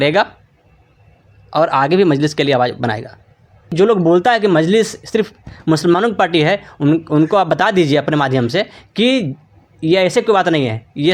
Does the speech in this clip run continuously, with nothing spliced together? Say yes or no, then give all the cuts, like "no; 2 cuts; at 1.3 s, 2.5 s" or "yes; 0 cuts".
no; 1 cut; at 3.7 s